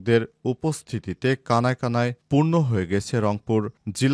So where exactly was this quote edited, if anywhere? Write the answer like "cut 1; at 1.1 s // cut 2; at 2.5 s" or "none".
none